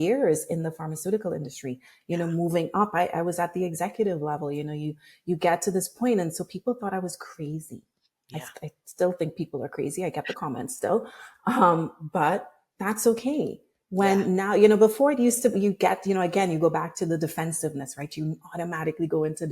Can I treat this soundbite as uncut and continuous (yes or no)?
no